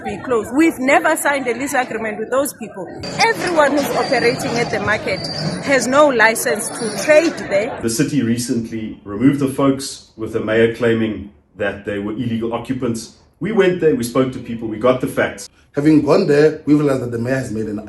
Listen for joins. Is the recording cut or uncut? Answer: cut